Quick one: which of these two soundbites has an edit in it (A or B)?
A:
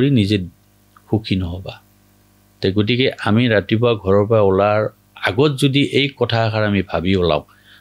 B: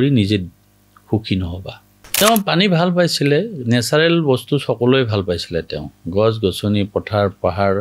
B